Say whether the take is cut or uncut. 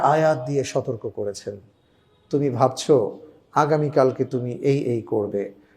uncut